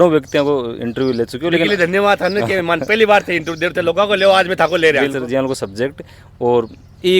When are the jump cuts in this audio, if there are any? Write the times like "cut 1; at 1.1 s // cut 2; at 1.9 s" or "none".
cut 1; at 5.1 s